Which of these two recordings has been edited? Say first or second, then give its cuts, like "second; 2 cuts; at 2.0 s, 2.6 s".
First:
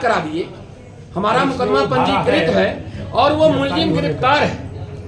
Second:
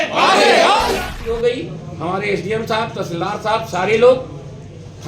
second; 1 cut; at 1.0 s